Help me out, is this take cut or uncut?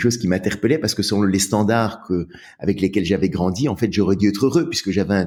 uncut